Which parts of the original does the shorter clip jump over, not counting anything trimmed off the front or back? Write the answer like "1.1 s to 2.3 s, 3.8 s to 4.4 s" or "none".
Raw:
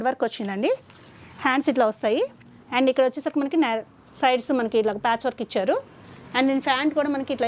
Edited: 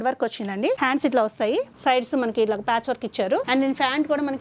0.8 s to 1.4 s, 2.4 s to 4.1 s, 5.8 s to 6.3 s